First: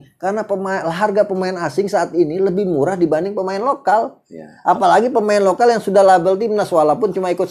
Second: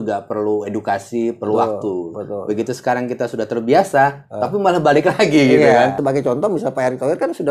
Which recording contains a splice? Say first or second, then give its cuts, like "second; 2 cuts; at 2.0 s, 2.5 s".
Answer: second; 1 cut; at 6.0 s